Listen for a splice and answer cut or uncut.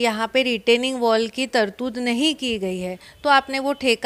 uncut